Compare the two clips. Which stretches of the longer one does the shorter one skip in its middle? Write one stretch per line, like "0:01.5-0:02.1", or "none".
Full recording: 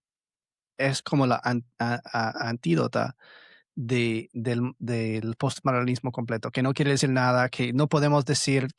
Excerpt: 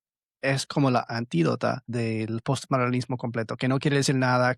0:01.4-0:02.4
0:03.2-0:04.8